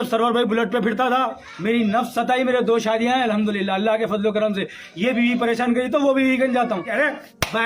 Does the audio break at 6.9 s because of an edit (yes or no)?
yes